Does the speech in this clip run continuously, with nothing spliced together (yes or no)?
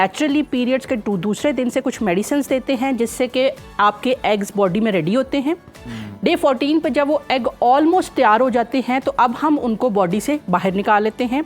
yes